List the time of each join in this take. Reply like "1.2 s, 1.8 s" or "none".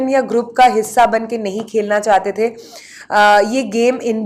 none

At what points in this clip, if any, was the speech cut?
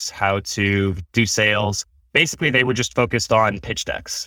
1.9 s

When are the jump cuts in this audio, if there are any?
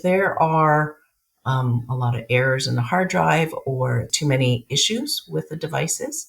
4.1 s

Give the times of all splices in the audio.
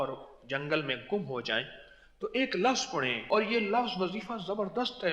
3.3 s

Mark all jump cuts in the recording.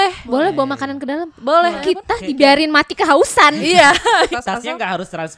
1.9 s, 4.3 s

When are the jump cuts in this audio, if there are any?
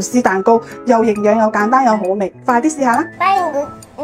3.1 s

